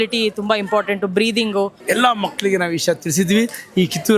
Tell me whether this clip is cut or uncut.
cut